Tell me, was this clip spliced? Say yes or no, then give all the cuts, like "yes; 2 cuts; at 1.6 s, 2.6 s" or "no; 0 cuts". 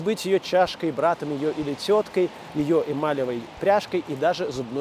no; 0 cuts